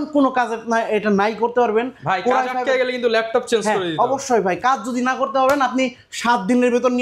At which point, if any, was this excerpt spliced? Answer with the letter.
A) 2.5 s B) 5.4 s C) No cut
C